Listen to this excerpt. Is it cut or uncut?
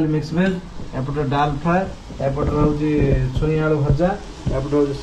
uncut